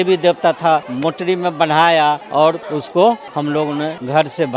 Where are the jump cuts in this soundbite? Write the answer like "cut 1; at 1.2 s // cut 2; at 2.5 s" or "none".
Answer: cut 1; at 0.9 s // cut 2; at 2.4 s // cut 3; at 3.7 s